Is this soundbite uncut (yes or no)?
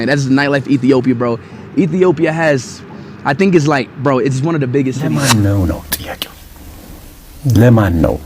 no